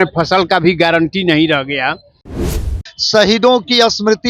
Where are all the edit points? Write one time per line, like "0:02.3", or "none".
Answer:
0:02.5